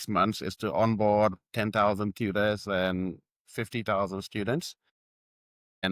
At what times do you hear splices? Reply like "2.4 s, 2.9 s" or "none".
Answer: none

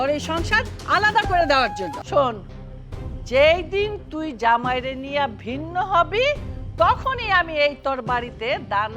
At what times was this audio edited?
2.0 s

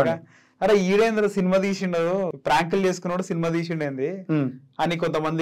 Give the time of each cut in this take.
2.4 s

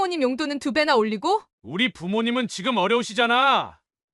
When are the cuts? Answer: 1.5 s

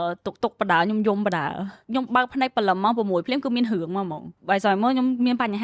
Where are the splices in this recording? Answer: 1.8 s

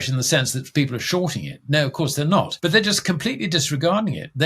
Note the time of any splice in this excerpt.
2.5 s

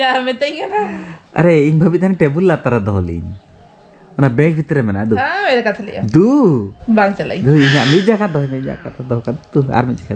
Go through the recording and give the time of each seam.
6.7 s

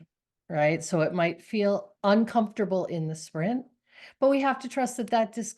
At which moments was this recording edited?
1.9 s

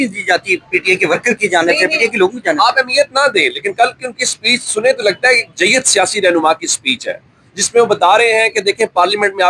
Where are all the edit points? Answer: none

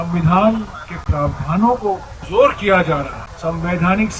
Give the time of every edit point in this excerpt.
2.1 s, 3.2 s

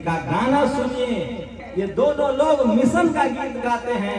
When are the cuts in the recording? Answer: 1.6 s

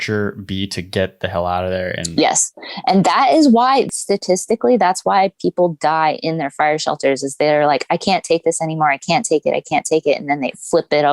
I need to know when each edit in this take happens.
3.9 s

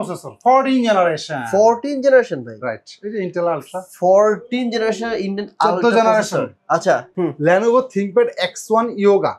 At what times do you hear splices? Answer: 7.1 s

